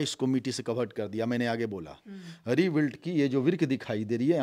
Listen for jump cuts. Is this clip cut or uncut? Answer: uncut